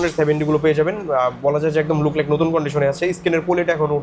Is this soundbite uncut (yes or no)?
yes